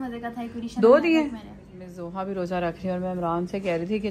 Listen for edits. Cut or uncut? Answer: cut